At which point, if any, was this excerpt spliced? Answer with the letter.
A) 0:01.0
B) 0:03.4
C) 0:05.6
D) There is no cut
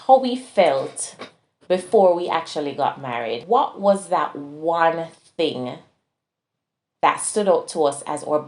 B